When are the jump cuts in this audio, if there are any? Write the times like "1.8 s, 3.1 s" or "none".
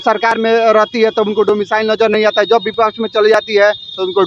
none